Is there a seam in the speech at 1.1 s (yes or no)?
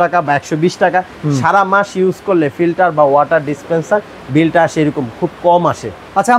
no